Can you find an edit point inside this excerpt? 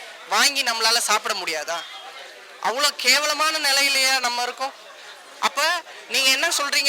no; 0 cuts

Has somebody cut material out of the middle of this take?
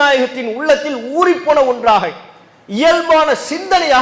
no; 0 cuts

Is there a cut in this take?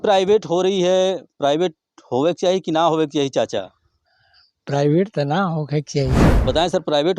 yes; 1 cut; at 6.2 s

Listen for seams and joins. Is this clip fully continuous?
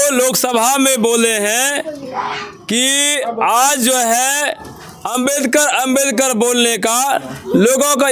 yes; 0 cuts

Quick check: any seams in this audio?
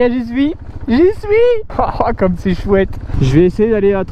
yes; 1 cut; at 3.1 s

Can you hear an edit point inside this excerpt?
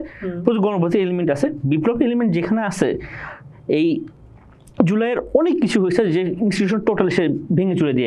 no; 0 cuts

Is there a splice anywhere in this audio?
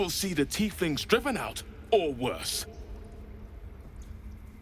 yes; 1 cut; at 3.1 s

